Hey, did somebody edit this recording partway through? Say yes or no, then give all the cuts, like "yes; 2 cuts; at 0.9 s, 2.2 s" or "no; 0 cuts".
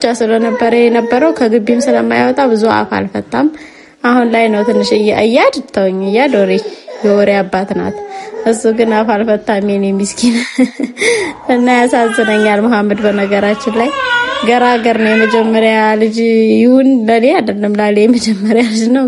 no; 0 cuts